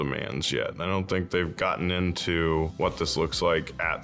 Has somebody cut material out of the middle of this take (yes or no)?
yes